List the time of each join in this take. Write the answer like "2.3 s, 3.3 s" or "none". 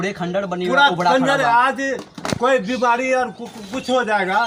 none